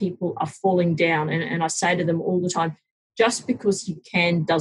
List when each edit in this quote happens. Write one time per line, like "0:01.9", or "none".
none